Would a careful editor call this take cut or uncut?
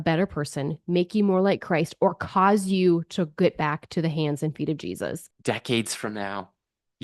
cut